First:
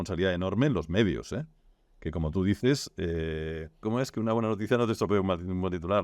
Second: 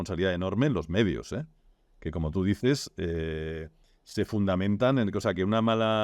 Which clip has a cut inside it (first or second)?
first